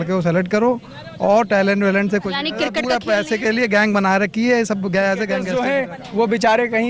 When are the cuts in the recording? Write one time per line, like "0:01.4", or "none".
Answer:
0:02.8
0:05.5